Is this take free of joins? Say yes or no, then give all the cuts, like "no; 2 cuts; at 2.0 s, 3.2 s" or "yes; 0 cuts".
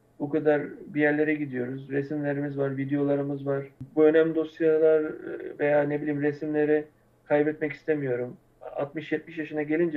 no; 1 cut; at 3.8 s